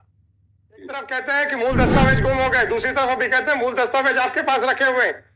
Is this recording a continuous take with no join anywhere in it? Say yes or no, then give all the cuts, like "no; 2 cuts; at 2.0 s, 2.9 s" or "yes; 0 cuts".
no; 1 cut; at 1.0 s